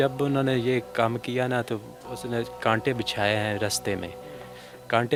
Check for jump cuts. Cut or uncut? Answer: uncut